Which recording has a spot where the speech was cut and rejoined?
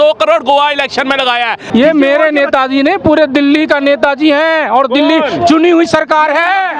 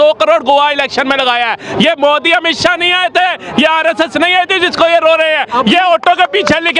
first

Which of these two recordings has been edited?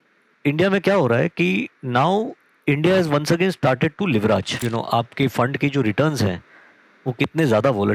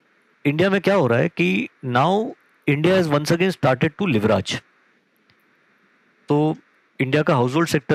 first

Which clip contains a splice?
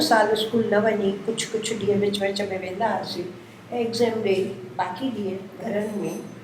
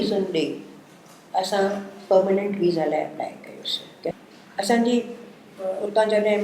second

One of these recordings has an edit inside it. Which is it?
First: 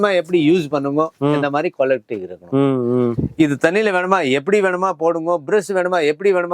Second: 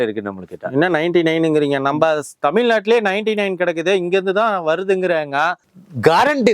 second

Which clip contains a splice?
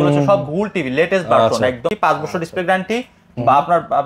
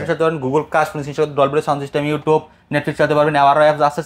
first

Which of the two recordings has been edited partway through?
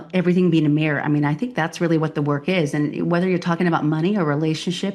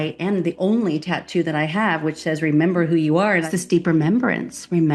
second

